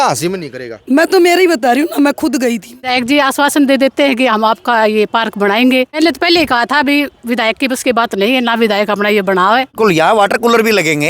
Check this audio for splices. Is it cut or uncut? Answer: cut